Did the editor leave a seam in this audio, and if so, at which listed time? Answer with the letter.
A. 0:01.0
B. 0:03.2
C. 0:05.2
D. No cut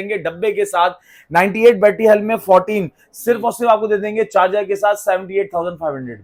D